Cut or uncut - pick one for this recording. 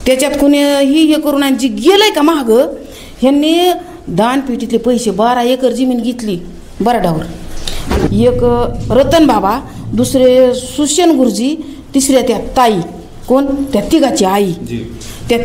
cut